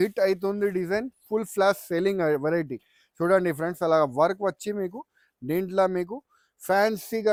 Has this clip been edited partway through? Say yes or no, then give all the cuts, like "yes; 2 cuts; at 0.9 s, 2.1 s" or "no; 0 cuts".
no; 0 cuts